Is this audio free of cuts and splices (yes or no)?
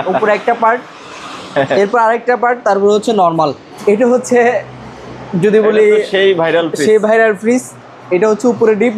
no